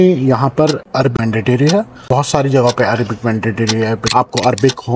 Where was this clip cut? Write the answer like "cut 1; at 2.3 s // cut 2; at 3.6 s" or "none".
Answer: cut 1; at 1.1 s // cut 2; at 2.0 s // cut 3; at 4.0 s